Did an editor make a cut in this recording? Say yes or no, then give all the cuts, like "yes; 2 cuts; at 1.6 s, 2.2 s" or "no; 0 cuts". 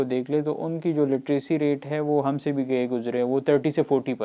no; 0 cuts